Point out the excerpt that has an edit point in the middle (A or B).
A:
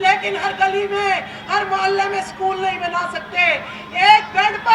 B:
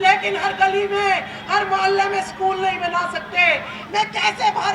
B